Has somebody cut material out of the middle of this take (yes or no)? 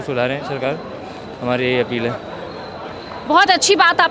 no